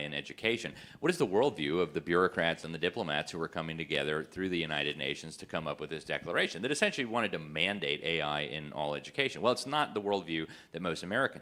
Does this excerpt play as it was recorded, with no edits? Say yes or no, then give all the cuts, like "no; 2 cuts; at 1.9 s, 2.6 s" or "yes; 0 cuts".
yes; 0 cuts